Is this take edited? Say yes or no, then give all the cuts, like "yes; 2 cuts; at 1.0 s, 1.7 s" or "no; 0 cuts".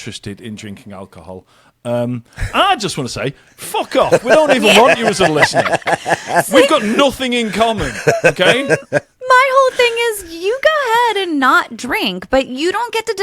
no; 0 cuts